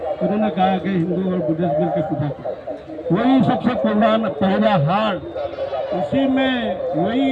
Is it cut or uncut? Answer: uncut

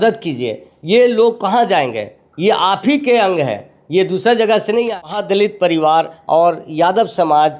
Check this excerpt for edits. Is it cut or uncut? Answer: cut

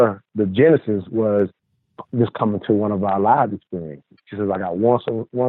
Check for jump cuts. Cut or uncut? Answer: cut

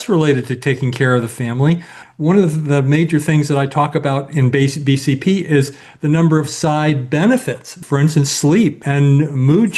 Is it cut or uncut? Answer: cut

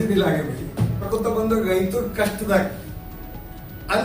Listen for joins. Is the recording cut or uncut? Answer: cut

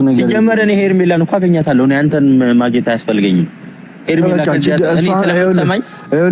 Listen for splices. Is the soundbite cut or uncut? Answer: cut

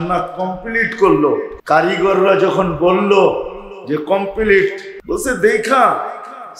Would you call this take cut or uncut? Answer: cut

